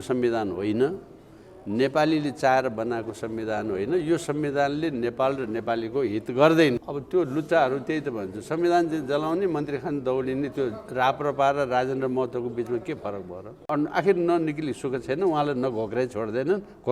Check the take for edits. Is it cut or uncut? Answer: cut